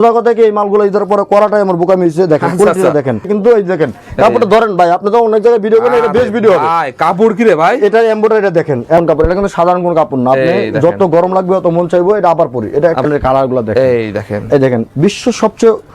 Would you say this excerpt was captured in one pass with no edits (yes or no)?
no